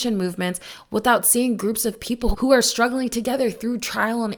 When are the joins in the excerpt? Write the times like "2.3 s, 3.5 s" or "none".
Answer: none